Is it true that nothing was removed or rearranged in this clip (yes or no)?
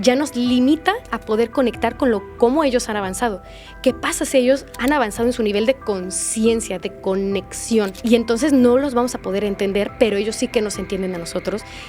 no